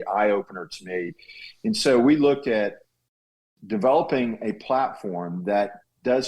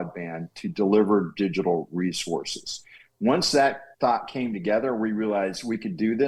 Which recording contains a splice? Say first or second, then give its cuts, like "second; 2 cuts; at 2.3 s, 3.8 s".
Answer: first; 1 cut; at 3.3 s